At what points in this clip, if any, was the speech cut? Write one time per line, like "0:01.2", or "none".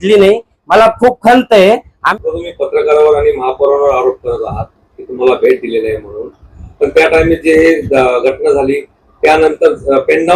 0:02.0